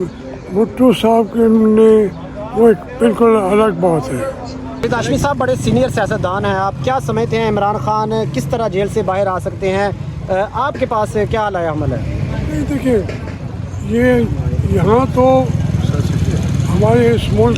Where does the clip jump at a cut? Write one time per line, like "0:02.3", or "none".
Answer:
0:04.9